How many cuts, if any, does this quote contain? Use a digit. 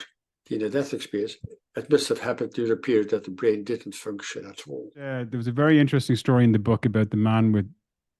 1